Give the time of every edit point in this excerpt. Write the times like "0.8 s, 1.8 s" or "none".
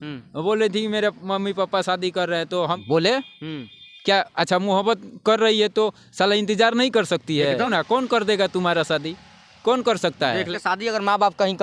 2.8 s, 7.7 s, 10.5 s